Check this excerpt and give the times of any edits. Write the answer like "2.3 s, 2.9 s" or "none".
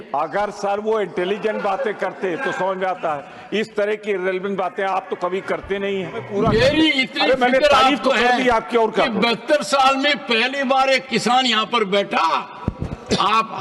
6.2 s